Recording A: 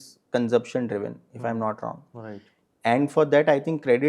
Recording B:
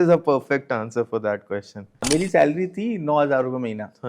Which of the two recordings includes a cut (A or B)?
B